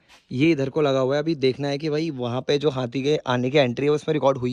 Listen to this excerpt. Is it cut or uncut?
uncut